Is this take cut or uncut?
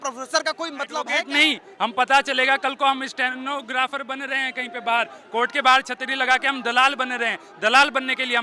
cut